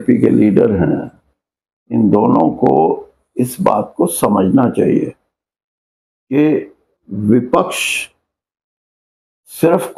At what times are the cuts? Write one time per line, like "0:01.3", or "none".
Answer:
none